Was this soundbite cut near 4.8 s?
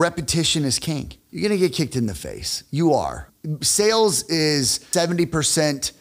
yes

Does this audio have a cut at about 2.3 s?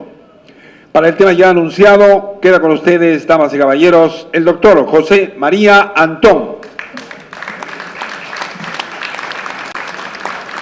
no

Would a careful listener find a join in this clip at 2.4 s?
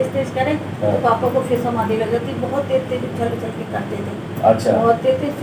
no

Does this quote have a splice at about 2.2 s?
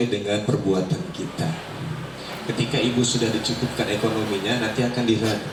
no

